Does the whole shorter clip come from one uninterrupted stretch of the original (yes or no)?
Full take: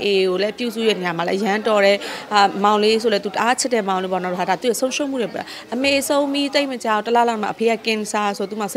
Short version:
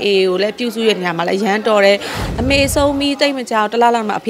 no